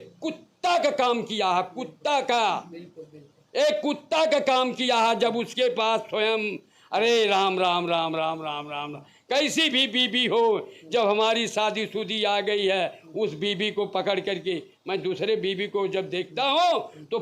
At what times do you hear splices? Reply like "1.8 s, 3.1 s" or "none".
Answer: none